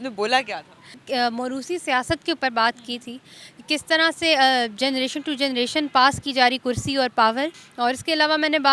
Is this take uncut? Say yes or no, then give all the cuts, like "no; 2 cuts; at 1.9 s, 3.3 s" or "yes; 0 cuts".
no; 2 cuts; at 1.0 s, 7.6 s